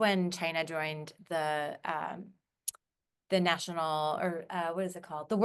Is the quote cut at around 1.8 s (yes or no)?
no